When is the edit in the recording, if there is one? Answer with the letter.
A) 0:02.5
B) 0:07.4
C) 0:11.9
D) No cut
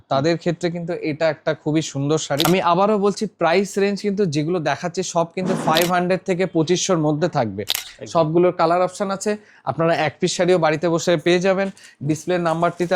A